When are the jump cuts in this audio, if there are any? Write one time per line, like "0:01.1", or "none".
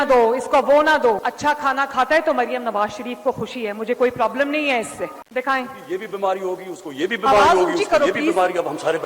0:05.1